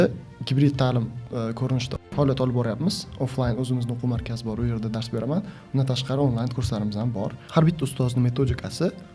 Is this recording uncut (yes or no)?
no